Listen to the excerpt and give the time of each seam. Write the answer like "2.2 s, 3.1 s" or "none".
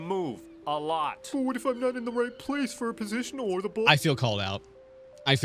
none